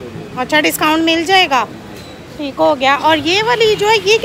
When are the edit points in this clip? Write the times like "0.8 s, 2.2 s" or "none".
none